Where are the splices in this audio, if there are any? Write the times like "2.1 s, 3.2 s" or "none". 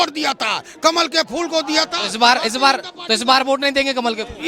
none